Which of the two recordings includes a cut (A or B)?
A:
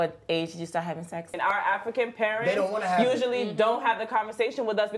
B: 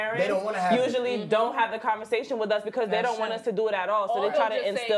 A